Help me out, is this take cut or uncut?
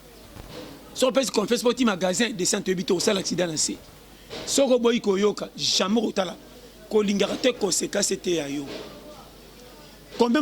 uncut